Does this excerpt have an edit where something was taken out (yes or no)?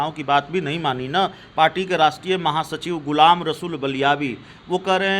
no